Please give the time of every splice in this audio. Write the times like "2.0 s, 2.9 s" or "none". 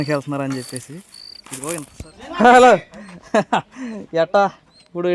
1.9 s